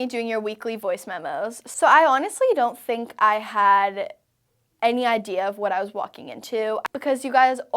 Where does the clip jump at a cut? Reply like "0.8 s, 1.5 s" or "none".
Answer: 1.6 s, 6.8 s